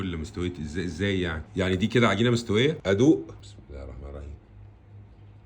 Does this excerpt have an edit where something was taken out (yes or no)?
yes